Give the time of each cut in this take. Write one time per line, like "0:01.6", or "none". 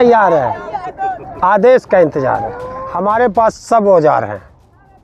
0:03.2